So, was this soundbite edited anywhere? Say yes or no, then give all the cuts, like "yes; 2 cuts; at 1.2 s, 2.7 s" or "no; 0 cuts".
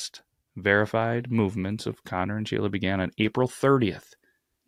no; 0 cuts